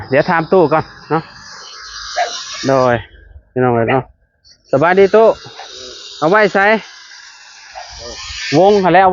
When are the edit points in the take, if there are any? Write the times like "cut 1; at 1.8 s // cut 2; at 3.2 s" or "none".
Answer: none